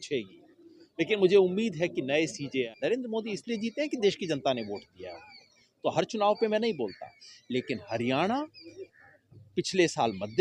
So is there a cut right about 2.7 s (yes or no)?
yes